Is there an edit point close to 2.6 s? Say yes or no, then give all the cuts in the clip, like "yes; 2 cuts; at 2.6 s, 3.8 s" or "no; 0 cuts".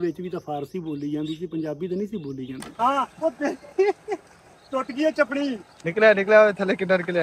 yes; 1 cut; at 2.6 s